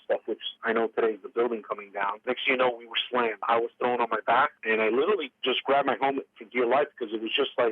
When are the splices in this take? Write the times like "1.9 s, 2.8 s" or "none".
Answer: 2.2 s, 3.5 s, 4.6 s